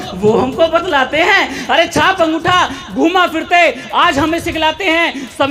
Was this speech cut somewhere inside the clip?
no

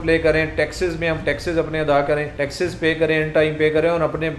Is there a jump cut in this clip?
yes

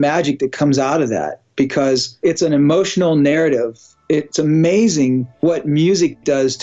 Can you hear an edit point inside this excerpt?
yes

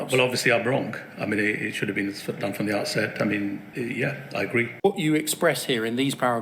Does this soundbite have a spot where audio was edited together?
yes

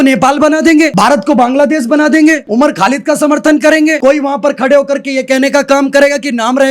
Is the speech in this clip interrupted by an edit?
yes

